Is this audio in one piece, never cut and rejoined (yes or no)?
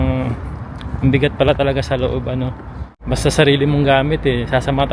no